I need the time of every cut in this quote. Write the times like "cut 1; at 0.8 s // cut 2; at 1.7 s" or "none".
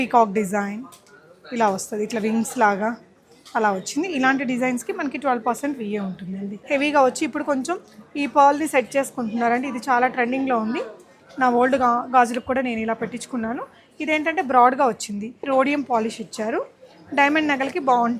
cut 1; at 6.5 s // cut 2; at 15.4 s